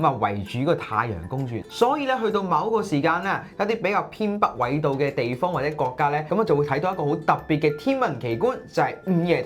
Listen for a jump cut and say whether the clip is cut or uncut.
cut